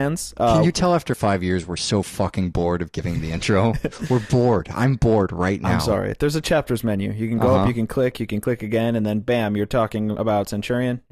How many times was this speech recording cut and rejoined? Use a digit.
1